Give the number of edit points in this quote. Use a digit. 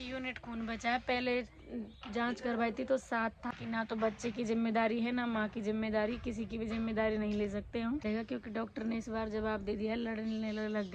2